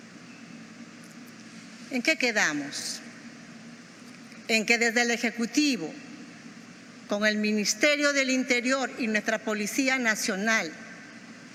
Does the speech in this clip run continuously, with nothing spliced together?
yes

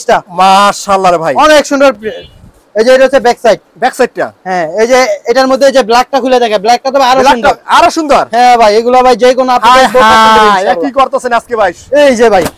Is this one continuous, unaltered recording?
yes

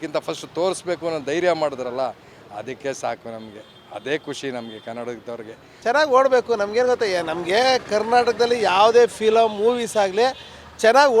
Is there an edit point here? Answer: yes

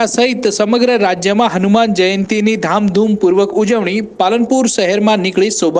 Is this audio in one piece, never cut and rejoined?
yes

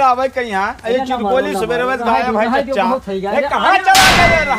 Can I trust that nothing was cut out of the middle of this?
yes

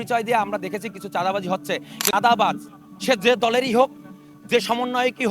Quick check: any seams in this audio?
yes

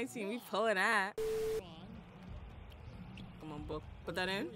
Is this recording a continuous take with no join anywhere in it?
no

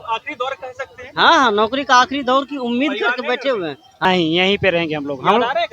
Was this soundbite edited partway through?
yes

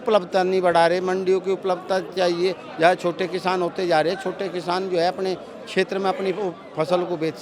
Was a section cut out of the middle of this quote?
no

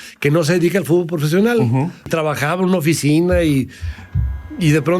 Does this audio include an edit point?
yes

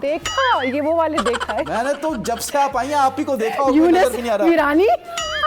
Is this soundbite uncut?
yes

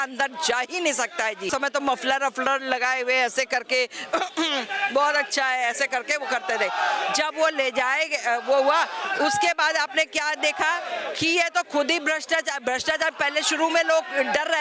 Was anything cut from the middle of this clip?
yes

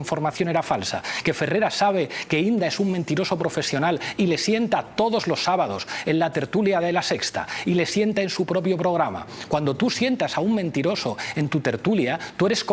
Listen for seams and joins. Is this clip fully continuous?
yes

